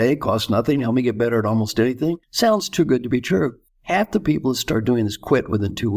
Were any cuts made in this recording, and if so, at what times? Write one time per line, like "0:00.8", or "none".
0:02.2
0:03.7

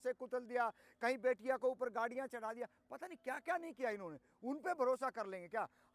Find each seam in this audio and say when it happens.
none

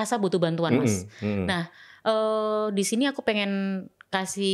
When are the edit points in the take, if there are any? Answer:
none

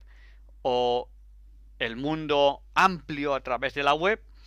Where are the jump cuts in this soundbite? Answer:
none

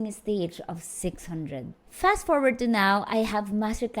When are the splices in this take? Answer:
0:01.7

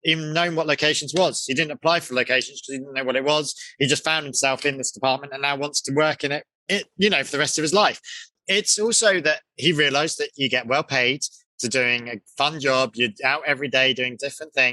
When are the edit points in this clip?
none

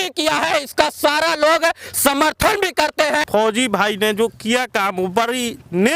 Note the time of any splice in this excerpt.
0:03.3

